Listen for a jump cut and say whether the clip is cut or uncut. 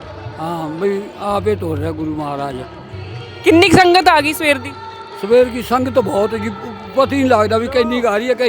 uncut